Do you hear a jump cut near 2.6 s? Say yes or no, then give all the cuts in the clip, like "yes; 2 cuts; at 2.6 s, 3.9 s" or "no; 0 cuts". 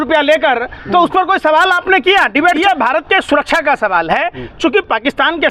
yes; 1 cut; at 2.6 s